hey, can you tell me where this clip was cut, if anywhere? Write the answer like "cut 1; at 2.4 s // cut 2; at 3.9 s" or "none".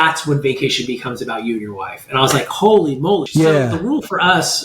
cut 1; at 3.3 s